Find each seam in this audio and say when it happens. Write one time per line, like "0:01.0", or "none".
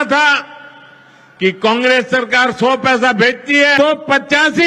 0:03.7

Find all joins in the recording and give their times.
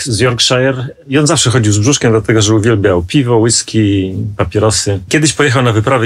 0:01.0

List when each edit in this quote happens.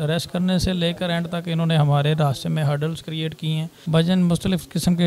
0:03.8

